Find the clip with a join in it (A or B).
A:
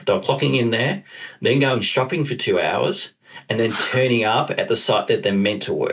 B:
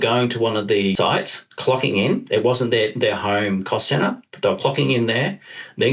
B